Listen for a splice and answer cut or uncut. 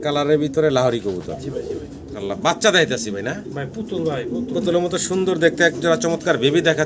cut